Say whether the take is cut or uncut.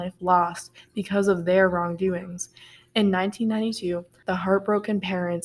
cut